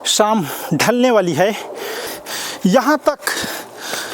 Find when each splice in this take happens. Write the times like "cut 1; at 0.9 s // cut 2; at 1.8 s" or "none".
cut 1; at 2.2 s